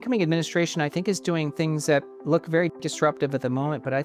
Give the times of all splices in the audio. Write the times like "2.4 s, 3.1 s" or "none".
none